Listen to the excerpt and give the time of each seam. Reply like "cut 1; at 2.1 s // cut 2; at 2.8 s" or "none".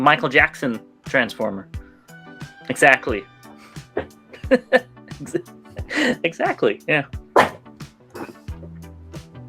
none

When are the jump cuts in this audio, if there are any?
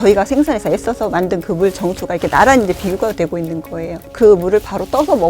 cut 1; at 4.0 s

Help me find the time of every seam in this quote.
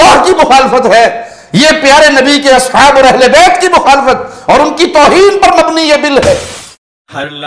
cut 1; at 6.5 s

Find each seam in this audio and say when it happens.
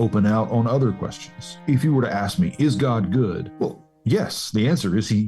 cut 1; at 1.6 s // cut 2; at 3.5 s

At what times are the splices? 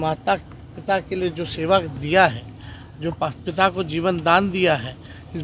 none

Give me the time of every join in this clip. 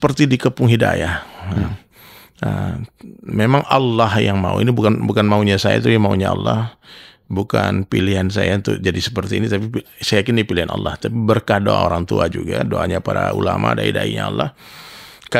none

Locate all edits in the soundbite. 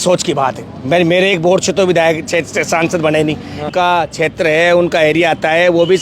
cut 1; at 3.7 s

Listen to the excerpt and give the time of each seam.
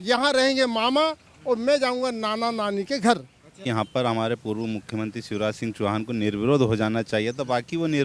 cut 1; at 3.6 s

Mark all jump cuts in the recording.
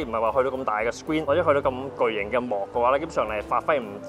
cut 1; at 1.2 s

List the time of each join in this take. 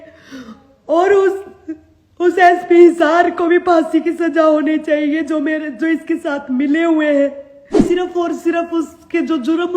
cut 1; at 7.8 s

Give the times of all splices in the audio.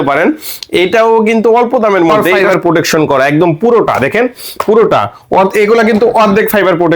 cut 1; at 2.4 s

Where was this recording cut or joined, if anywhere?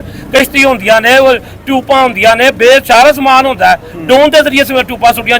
none

